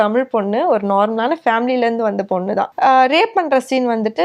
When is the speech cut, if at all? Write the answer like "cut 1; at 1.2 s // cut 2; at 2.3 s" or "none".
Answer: cut 1; at 2.7 s